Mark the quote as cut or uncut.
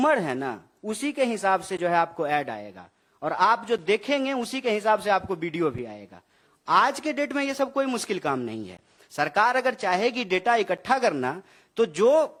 uncut